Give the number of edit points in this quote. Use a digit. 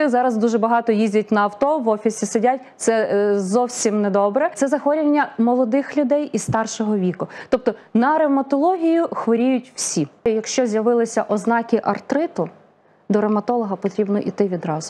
2